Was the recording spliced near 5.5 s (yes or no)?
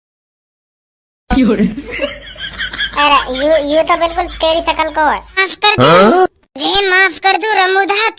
yes